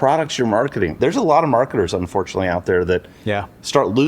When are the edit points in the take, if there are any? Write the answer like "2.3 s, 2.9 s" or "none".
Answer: 0.9 s